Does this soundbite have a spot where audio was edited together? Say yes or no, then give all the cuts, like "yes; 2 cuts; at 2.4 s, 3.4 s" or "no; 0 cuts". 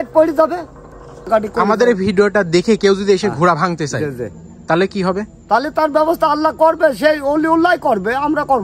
yes; 1 cut; at 1.3 s